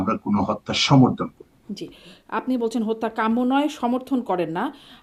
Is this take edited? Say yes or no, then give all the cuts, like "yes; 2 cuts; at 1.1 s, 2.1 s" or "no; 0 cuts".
no; 0 cuts